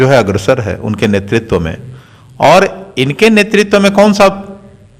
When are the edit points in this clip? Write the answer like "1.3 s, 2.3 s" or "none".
none